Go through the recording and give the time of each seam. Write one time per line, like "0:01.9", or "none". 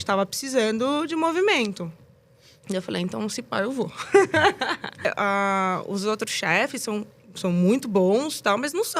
0:05.0